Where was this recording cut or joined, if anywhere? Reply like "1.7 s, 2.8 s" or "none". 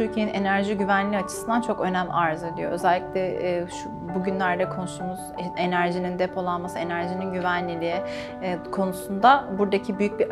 none